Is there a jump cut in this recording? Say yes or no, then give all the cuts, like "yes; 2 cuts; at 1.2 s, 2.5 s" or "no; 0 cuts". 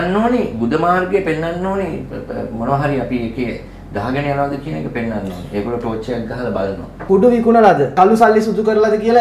yes; 1 cut; at 7.0 s